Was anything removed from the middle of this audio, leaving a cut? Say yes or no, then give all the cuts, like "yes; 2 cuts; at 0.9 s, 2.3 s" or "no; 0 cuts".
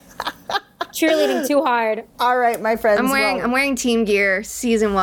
yes; 1 cut; at 2.1 s